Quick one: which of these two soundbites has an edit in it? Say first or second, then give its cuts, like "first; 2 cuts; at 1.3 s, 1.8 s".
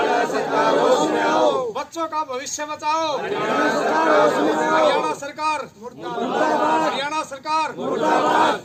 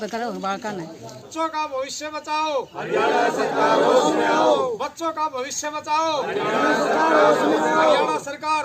second; 1 cut; at 1.2 s